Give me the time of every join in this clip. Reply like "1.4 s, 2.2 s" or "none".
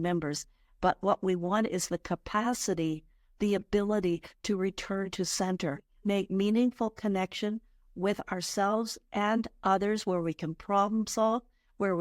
5.9 s